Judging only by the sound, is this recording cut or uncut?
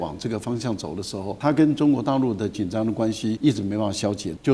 cut